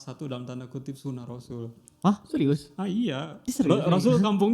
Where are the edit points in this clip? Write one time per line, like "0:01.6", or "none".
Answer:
0:03.3